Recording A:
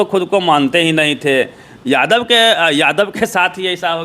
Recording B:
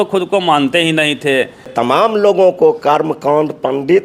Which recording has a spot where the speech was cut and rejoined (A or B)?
B